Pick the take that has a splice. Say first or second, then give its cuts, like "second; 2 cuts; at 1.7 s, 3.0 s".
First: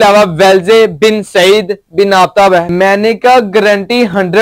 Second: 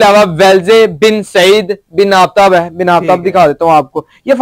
first; 1 cut; at 2.7 s